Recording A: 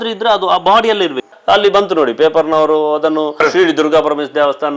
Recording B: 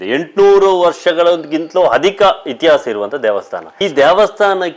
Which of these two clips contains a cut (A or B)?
A